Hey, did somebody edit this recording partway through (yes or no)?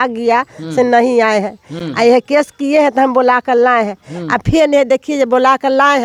no